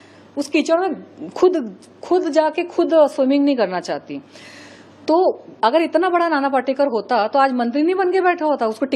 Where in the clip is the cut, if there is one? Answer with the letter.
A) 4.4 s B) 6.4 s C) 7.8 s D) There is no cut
D